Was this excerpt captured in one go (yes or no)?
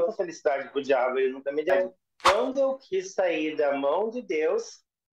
no